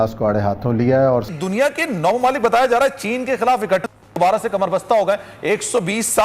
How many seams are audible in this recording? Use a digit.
1